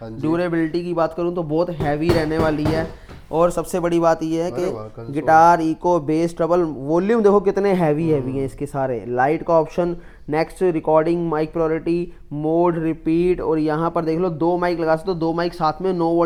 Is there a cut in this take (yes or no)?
no